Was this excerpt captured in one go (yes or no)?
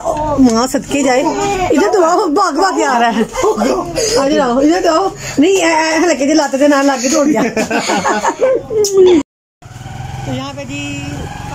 no